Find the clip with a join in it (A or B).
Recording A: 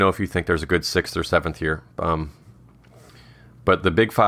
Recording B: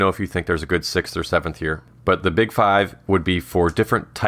B